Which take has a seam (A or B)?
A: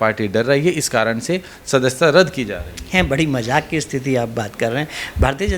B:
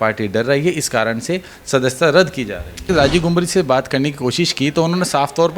B